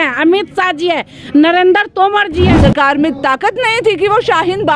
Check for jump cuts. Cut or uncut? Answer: cut